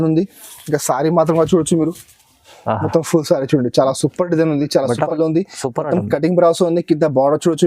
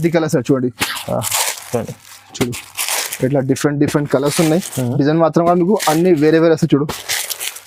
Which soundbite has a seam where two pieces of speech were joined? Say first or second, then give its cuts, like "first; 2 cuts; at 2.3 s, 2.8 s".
first; 1 cut; at 5.0 s